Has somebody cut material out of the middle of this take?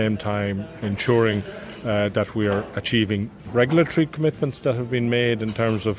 yes; 1 cut; at 3.4 s

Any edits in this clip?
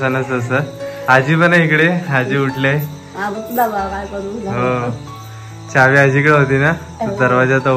no; 0 cuts

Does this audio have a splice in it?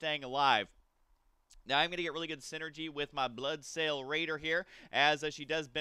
no; 0 cuts

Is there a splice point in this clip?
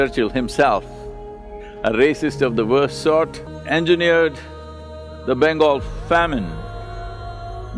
yes; 1 cut; at 3.5 s

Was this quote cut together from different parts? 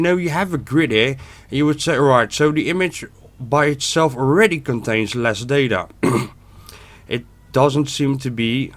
no; 0 cuts

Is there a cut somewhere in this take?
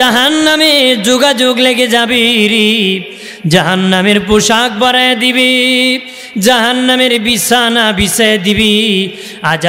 no; 0 cuts

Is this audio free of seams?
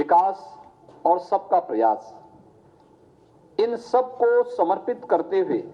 no; 1 cut; at 4.8 s

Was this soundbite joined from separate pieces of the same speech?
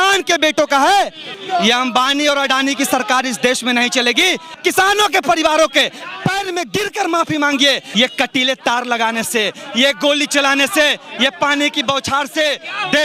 yes; 3 cuts; at 1.4 s, 4.6 s, 7.8 s

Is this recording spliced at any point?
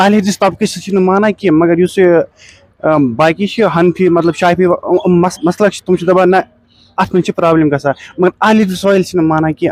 no; 0 cuts

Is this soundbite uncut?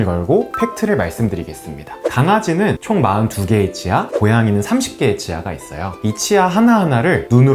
yes; 0 cuts

